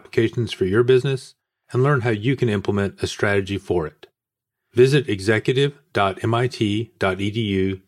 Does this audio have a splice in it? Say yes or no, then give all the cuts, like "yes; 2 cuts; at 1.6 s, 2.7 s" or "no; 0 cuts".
no; 0 cuts